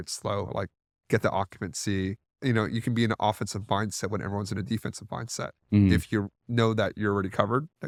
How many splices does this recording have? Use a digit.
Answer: 0